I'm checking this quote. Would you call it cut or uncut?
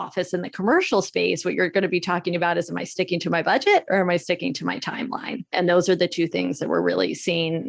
cut